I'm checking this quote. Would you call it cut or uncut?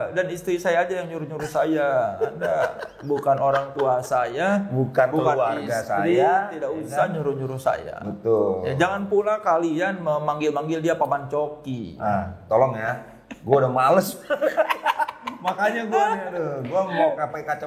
uncut